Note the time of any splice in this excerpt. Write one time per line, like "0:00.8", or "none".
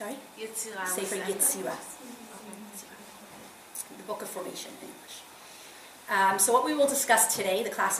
0:02.5